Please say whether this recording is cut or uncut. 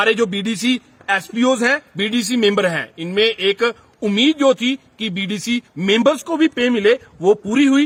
uncut